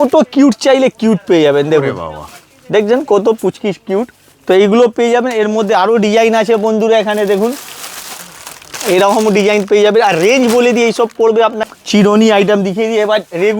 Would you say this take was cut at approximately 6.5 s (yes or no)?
no